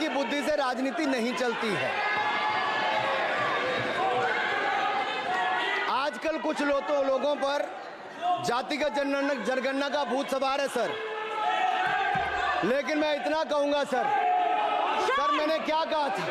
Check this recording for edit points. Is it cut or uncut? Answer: uncut